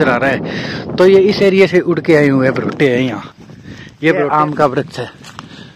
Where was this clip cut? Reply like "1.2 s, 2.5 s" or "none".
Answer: 4.3 s